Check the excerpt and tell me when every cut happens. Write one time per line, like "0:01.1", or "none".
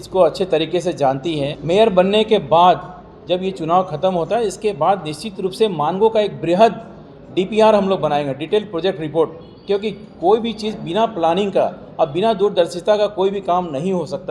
0:01.5